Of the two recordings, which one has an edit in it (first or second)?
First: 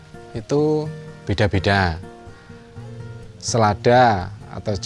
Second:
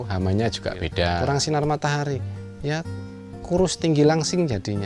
second